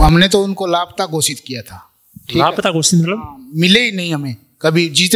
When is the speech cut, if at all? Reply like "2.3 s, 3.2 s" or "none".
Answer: none

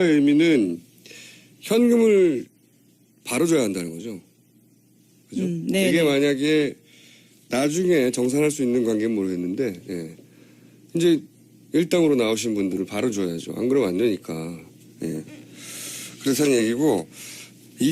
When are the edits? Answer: 8.7 s

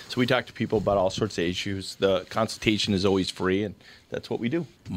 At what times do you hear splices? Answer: none

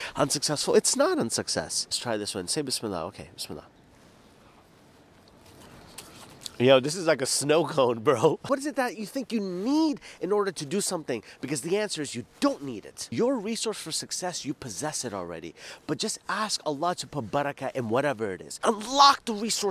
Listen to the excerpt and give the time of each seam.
1.9 s, 8.4 s, 13.0 s, 18.5 s

